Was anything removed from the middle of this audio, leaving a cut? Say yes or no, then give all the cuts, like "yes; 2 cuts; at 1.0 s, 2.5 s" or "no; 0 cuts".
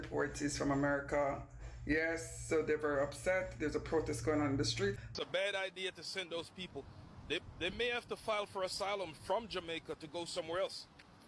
yes; 1 cut; at 5.1 s